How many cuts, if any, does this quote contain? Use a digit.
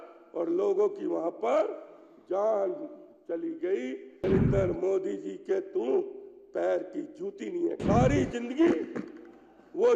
2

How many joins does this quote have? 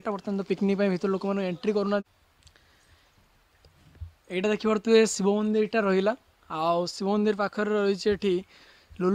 1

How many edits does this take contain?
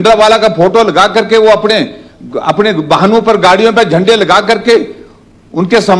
0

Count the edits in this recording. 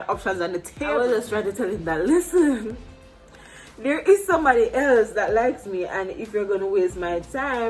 1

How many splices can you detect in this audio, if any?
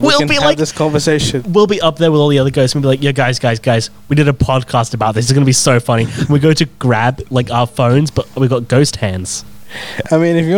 0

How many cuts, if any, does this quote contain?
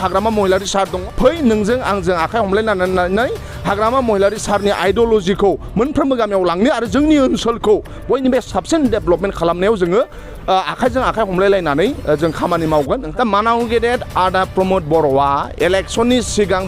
2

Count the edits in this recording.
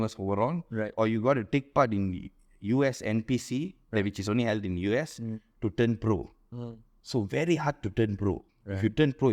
0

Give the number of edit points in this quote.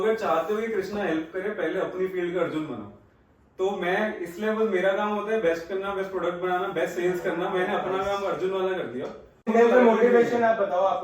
1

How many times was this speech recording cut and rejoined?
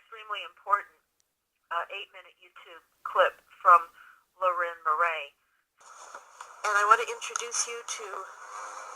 1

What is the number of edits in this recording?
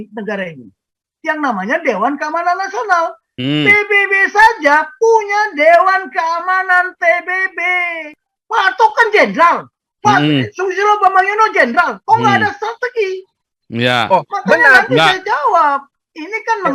1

